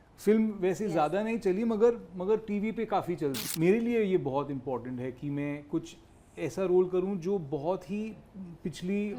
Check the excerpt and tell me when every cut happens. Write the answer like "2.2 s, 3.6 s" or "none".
3.4 s